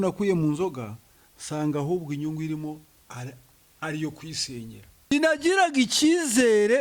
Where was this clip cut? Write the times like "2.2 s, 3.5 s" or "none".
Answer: 5.1 s